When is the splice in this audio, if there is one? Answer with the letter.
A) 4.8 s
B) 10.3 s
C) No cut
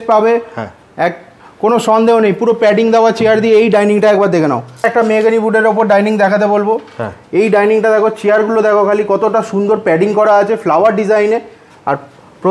A